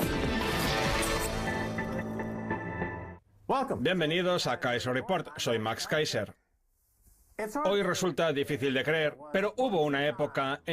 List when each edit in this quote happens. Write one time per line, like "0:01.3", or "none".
0:03.1